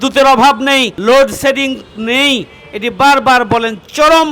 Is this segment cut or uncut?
cut